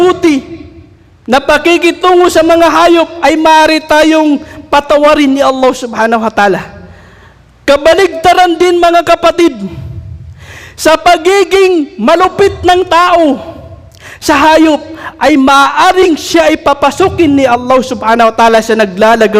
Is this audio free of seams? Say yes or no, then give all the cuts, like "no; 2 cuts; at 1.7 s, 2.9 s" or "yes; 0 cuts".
yes; 0 cuts